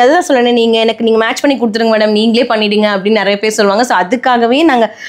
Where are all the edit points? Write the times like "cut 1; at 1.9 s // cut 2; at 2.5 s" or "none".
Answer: none

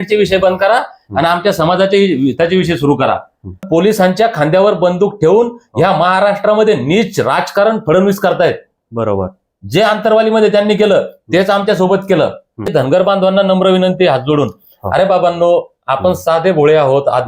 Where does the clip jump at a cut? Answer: cut 1; at 3.6 s // cut 2; at 12.7 s

